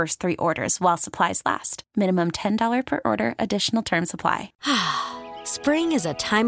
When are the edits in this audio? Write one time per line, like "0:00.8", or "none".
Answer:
0:04.5